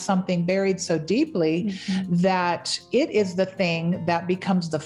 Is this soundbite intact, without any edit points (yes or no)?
yes